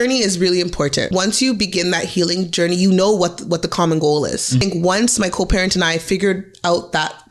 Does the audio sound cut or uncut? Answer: cut